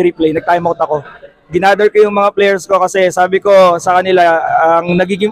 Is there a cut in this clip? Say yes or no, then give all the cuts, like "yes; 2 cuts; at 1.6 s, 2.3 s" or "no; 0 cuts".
no; 0 cuts